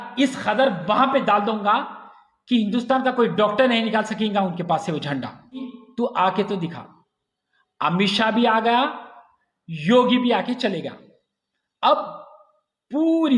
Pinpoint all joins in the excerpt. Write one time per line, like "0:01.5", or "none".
0:05.8